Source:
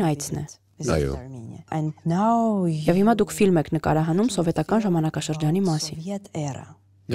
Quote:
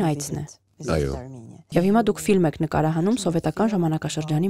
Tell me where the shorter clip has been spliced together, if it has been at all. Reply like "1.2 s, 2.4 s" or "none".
1.7 s